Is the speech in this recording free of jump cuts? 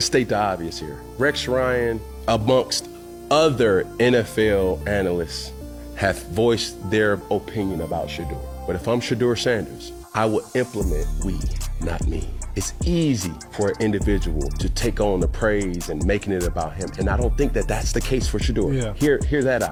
yes; 0 cuts

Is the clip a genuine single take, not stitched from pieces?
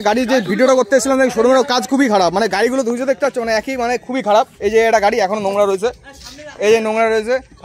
yes; 0 cuts

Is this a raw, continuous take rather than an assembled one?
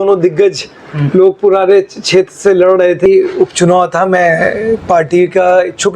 no; 1 cut; at 3.0 s

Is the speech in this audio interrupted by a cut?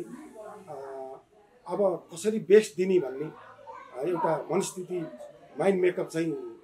no; 0 cuts

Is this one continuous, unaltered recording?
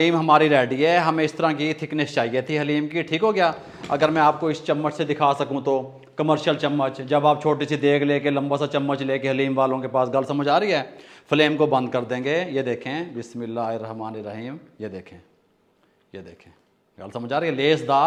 yes; 0 cuts

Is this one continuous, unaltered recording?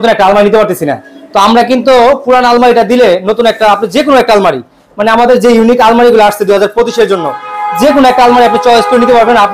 yes; 0 cuts

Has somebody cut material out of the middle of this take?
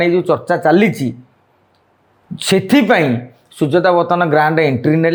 no; 0 cuts

